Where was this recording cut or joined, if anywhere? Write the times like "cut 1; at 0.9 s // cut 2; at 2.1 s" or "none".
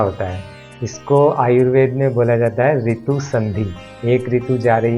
cut 1; at 3.8 s